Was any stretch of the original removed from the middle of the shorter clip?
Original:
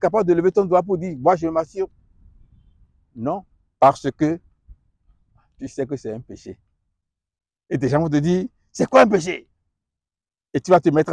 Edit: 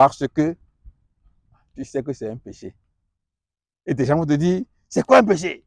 no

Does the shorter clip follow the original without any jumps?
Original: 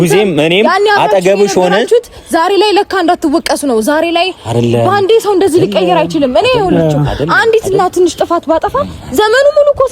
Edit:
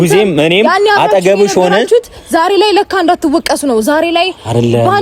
yes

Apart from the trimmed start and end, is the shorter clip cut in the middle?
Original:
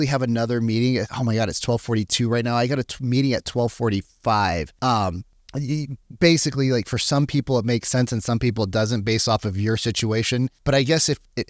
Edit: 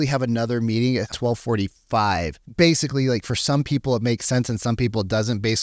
yes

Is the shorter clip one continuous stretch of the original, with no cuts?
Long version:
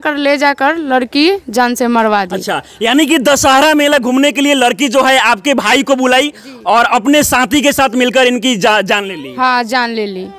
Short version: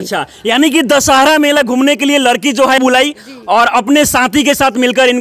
no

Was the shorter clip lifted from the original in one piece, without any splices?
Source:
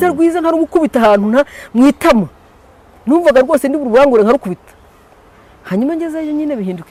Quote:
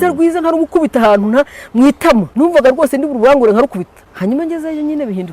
no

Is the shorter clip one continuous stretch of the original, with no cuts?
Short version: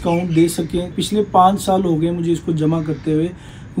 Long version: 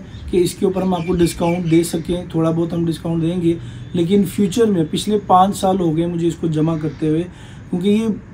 no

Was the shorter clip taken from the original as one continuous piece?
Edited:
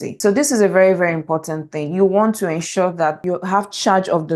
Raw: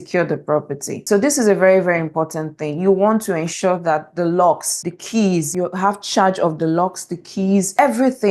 no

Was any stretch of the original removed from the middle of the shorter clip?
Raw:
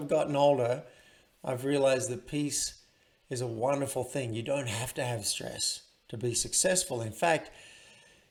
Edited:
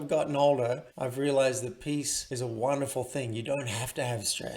yes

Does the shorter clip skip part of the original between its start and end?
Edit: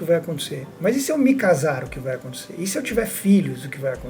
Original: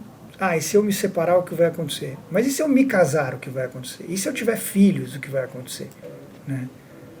no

